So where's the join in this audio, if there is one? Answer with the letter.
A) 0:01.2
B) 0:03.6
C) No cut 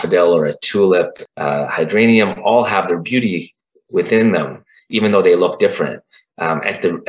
A